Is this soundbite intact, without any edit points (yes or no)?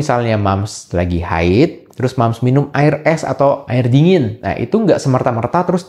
yes